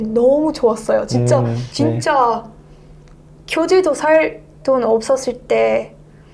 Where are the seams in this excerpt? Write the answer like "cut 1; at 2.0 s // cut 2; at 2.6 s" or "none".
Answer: cut 1; at 1.7 s